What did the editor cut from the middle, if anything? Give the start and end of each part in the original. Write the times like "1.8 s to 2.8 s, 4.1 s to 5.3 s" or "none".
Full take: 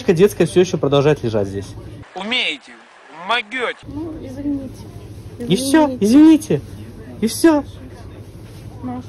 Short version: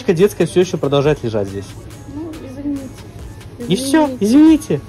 2.0 s to 3.8 s